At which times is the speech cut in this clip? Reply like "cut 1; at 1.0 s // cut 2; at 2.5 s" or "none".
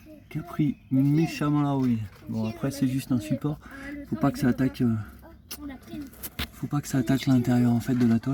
none